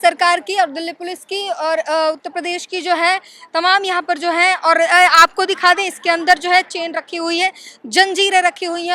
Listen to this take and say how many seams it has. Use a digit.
0